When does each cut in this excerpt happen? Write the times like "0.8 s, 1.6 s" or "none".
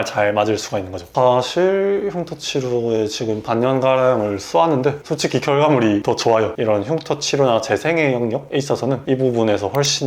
1.0 s, 6.5 s